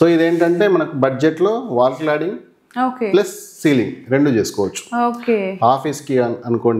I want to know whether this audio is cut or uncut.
uncut